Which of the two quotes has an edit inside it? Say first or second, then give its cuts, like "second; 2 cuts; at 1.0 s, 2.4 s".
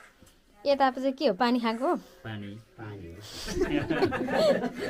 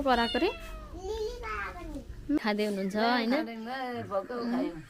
second; 1 cut; at 2.4 s